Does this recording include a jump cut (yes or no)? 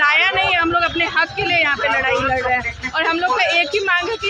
no